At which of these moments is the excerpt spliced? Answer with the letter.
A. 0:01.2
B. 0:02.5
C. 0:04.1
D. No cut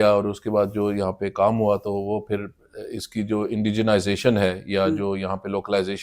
D